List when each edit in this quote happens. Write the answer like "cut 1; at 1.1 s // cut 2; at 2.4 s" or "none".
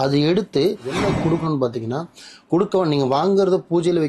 cut 1; at 0.9 s